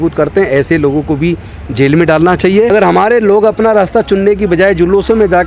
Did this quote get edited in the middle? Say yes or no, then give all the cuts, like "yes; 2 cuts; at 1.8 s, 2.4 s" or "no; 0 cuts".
yes; 1 cut; at 2.7 s